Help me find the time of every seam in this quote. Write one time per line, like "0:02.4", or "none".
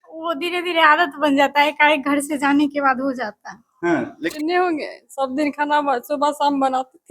0:04.1

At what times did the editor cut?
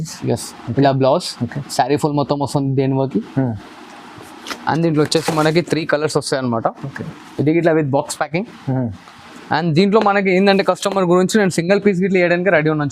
none

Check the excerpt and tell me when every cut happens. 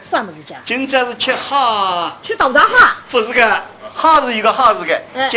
none

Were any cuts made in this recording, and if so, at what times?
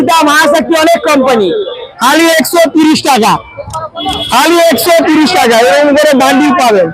0:01.9

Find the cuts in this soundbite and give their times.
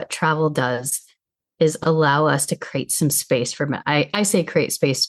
none

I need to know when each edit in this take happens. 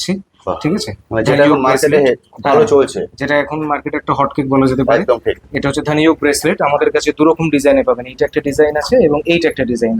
none

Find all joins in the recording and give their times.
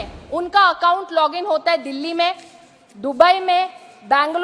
none

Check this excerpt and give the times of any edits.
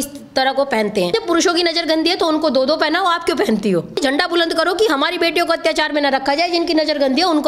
0:01.1
0:04.0

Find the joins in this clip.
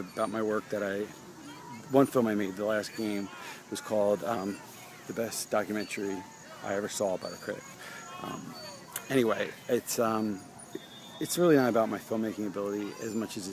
0:10.1

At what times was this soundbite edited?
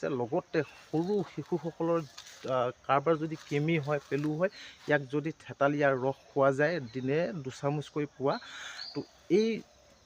none

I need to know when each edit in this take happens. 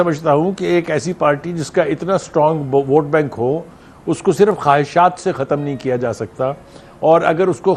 none

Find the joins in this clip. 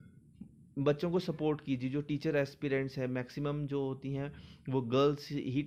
none

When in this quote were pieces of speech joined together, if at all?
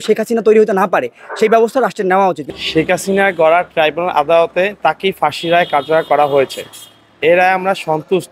0:02.4

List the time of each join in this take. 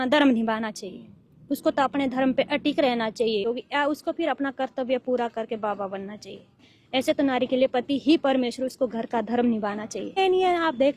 0:03.5
0:10.2

